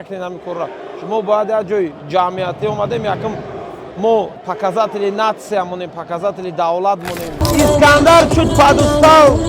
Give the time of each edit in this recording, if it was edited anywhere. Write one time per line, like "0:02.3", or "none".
0:04.5
0:07.4